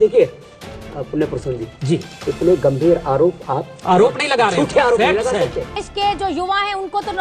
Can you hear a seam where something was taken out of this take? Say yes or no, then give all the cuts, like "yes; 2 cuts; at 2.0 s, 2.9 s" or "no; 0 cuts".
yes; 1 cut; at 5.8 s